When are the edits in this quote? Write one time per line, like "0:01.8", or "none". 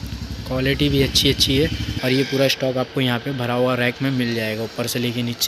0:01.9